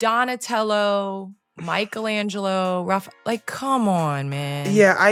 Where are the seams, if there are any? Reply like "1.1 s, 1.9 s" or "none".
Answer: none